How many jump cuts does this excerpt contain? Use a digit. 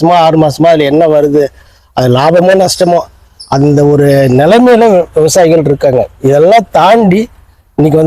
0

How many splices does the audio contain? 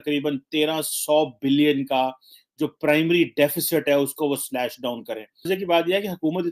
0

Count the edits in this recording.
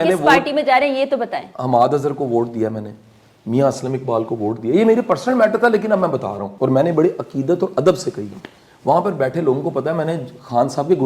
1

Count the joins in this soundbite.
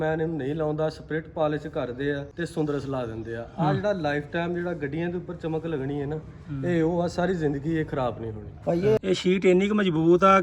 2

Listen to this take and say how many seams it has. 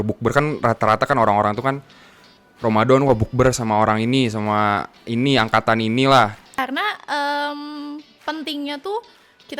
1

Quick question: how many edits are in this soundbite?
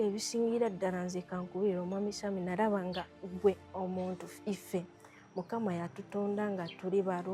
0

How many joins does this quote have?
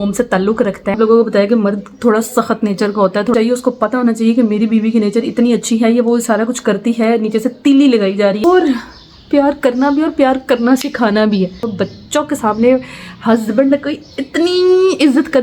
4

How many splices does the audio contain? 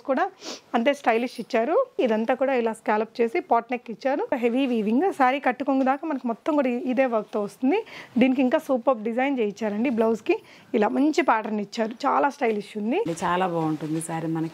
3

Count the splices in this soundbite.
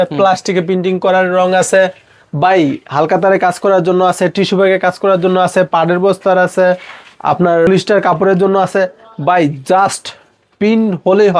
1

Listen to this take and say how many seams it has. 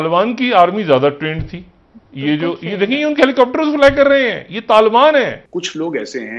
1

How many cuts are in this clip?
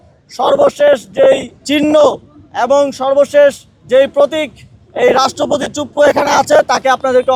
0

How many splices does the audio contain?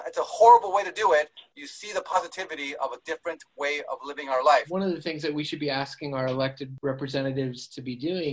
2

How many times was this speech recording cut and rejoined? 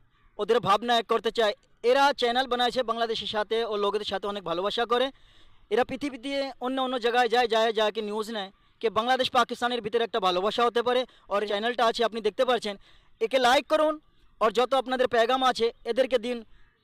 1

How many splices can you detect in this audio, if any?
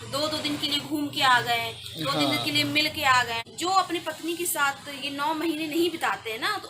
1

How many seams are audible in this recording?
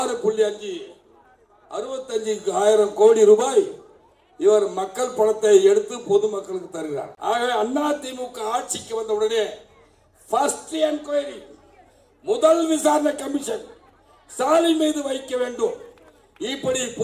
1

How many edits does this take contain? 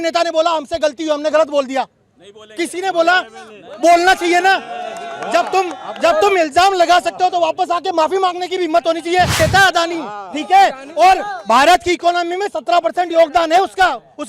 1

